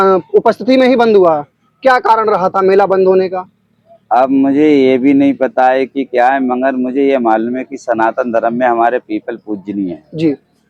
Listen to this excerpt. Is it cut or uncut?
uncut